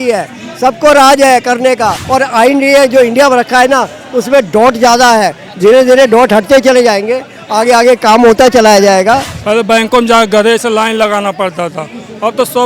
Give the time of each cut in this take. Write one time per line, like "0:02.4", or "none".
0:02.0
0:09.3

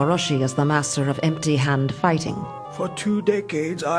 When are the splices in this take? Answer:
0:01.6

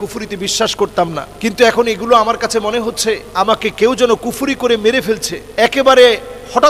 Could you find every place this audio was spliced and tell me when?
0:01.2
0:03.3
0:05.4

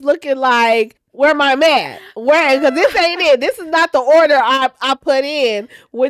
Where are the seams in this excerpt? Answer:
0:01.0

